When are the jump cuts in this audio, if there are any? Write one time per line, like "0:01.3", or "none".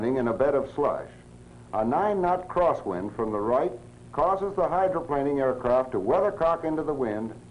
0:06.4